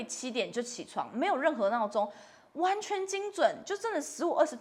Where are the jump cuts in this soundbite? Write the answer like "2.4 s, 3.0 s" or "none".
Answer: none